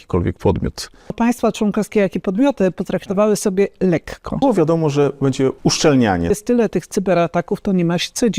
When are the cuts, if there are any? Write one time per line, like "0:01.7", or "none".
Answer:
0:01.1
0:04.4
0:05.6
0:06.3